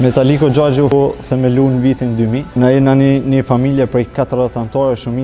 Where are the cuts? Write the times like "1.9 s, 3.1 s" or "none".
0.9 s, 2.4 s